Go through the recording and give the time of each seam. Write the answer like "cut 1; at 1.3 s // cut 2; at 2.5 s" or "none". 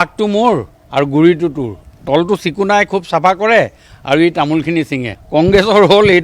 none